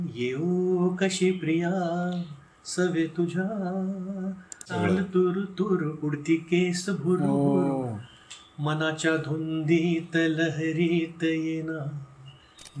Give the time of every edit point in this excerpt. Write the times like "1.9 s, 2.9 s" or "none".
4.7 s

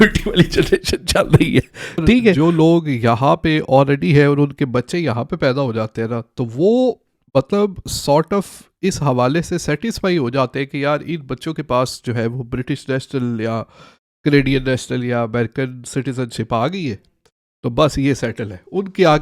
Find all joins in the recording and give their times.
2.4 s

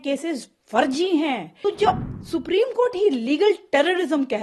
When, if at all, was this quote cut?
1.5 s

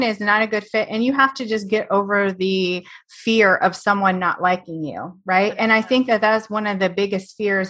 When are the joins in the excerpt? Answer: none

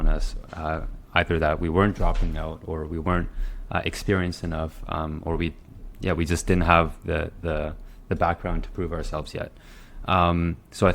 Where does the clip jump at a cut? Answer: none

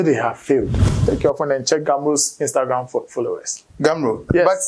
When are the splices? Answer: 0.9 s

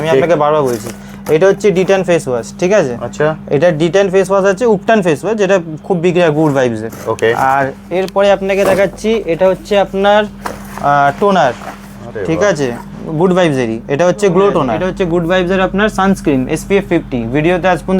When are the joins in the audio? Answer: 14.8 s

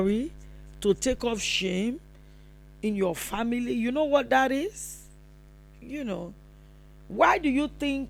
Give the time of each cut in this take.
none

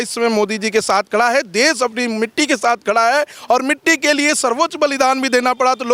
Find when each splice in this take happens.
none

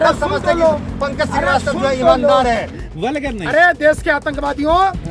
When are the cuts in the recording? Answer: 2.8 s

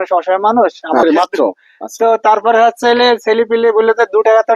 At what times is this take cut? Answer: 1.0 s

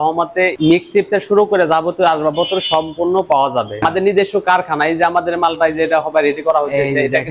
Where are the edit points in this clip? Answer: 3.8 s

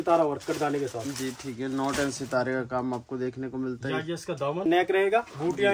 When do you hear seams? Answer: 4.7 s

